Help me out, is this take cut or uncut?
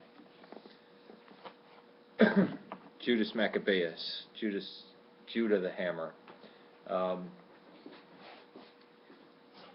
uncut